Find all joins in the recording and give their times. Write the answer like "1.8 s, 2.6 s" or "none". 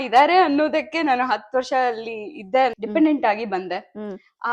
2.8 s